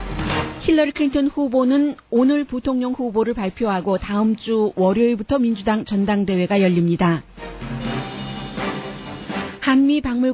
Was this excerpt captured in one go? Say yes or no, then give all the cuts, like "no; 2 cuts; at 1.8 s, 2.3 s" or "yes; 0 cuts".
no; 1 cut; at 6.7 s